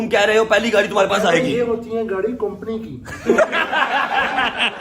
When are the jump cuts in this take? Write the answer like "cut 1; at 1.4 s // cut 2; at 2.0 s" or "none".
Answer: cut 1; at 3.8 s